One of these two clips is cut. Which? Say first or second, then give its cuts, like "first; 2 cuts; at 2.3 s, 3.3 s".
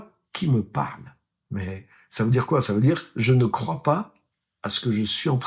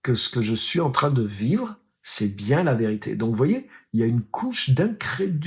first; 1 cut; at 1.3 s